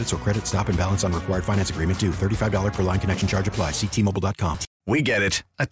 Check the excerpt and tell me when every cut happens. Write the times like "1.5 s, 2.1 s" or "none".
4.7 s